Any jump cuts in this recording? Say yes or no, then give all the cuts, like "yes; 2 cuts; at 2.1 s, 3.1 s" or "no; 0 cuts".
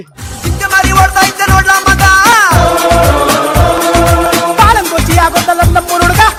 no; 0 cuts